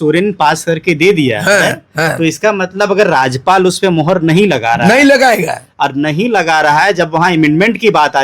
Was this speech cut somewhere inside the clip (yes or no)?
no